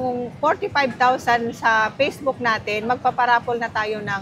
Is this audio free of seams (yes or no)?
yes